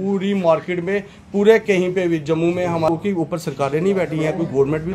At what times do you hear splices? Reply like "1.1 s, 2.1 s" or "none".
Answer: 2.9 s